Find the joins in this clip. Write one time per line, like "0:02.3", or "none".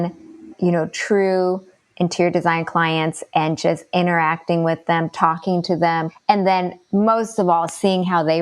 0:06.1